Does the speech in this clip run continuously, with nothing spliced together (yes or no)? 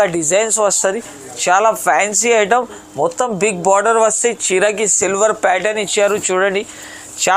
yes